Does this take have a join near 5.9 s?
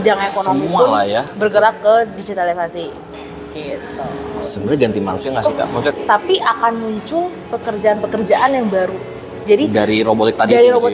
yes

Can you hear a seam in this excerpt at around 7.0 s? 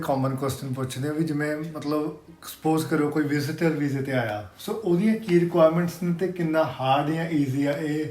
no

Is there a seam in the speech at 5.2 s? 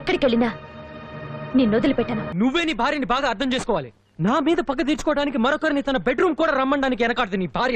no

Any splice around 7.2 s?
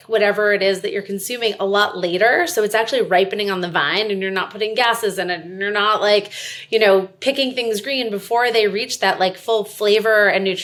no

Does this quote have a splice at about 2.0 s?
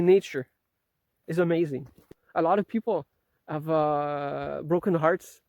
yes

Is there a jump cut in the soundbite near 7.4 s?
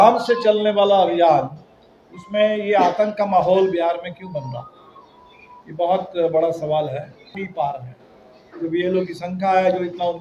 yes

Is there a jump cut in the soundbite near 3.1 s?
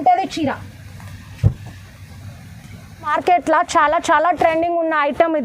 yes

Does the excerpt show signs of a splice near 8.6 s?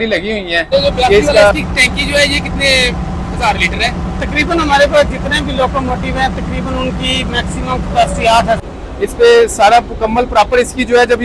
yes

